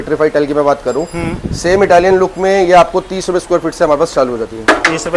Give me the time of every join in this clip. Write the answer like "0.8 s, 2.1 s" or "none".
none